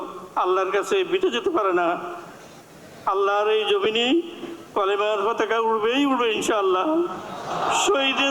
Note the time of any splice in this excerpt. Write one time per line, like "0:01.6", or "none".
none